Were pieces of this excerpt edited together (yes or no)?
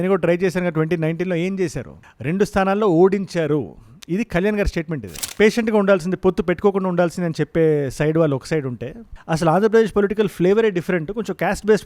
yes